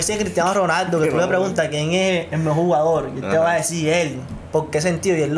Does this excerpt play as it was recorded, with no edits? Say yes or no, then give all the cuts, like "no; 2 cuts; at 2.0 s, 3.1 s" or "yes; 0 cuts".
yes; 0 cuts